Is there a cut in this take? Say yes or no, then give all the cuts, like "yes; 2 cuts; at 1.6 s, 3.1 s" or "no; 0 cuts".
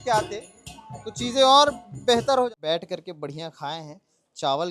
yes; 1 cut; at 2.5 s